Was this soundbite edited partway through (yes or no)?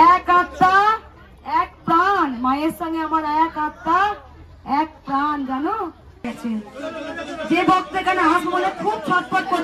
yes